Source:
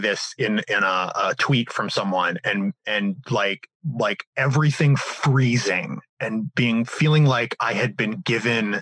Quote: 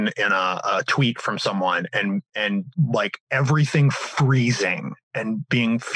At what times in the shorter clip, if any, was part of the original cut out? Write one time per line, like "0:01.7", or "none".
0:02.7

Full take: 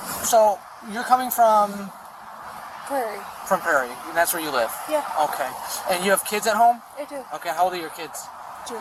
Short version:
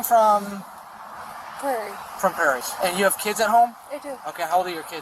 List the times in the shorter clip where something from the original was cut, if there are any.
0:02.7

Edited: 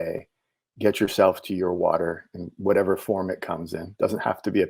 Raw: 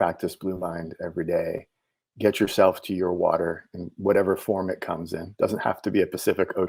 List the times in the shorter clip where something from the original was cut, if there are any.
none

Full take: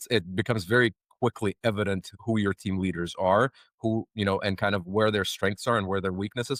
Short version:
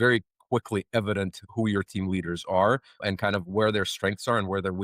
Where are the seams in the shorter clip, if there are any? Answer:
0:03.0

